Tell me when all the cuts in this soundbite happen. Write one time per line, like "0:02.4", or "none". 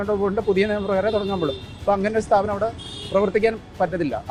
none